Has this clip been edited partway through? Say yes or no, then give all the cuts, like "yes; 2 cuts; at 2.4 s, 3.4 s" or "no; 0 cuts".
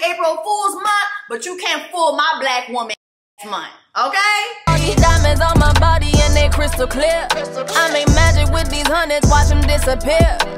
yes; 1 cut; at 4.6 s